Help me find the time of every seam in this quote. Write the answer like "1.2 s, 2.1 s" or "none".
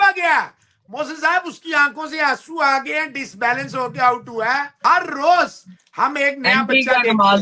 4.8 s